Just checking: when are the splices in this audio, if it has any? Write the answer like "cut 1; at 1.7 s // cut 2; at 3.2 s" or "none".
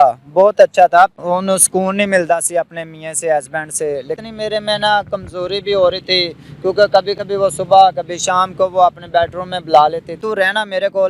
cut 1; at 1.1 s // cut 2; at 4.2 s // cut 3; at 10.2 s